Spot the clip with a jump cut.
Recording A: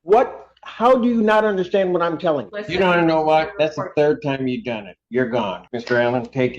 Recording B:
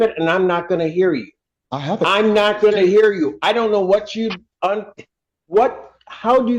A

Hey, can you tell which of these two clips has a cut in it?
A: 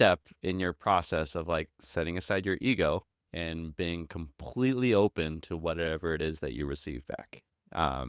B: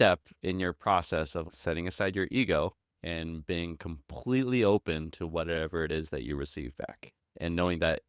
B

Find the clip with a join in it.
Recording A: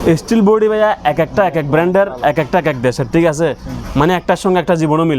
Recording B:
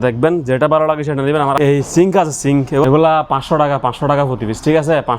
B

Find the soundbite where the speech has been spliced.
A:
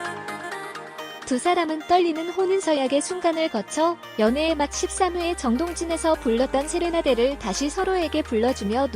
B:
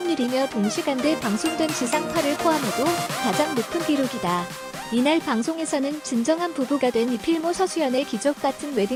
A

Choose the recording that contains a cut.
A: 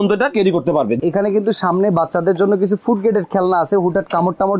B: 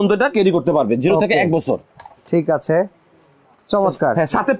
A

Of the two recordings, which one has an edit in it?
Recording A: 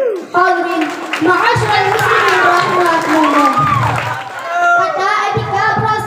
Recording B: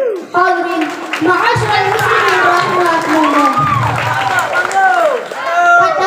A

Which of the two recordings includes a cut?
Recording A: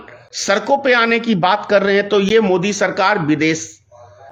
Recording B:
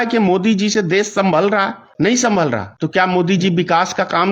B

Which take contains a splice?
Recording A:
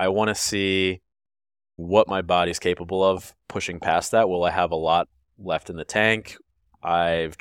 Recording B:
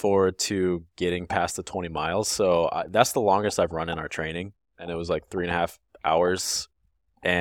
A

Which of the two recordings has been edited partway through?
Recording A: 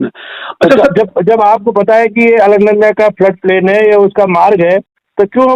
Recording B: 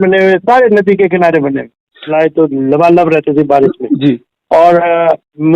B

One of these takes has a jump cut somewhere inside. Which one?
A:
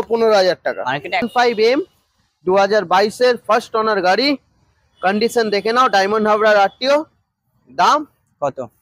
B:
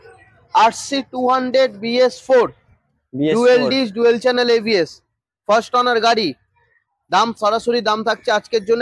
A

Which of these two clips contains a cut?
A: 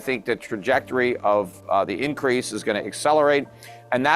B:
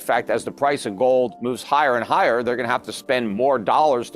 B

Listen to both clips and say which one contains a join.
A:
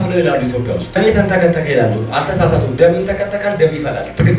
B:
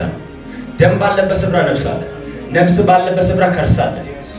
A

